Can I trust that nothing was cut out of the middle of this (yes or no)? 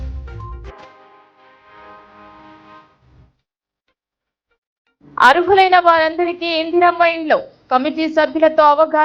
yes